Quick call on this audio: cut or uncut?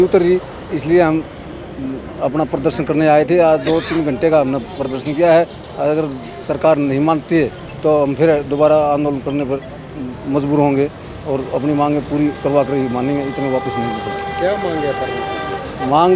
uncut